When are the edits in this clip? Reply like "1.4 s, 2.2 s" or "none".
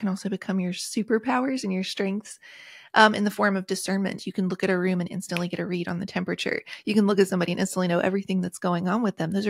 none